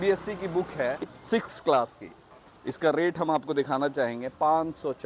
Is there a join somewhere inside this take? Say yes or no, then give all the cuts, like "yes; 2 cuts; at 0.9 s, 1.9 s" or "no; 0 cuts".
yes; 1 cut; at 1.1 s